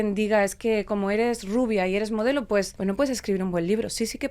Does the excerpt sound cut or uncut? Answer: cut